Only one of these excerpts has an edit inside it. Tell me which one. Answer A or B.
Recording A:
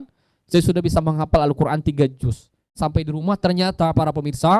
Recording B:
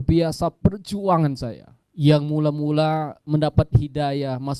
A